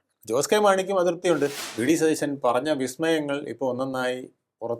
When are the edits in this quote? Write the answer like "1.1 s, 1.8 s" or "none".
1.6 s